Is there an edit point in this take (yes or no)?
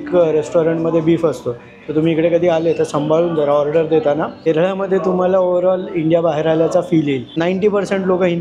yes